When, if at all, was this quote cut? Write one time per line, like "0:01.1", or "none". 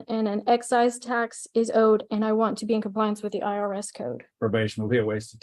0:04.3